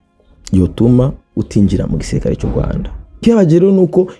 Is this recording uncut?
no; 1 cut; at 3.2 s

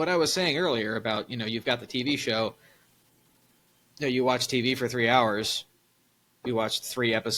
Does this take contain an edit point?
no; 0 cuts

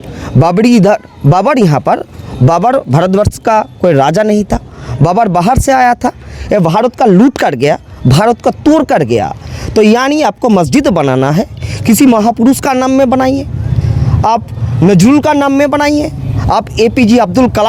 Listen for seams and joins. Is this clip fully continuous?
yes; 0 cuts

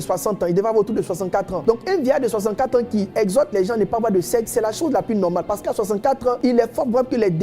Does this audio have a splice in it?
yes; 2 cuts; at 1.5 s, 6.4 s

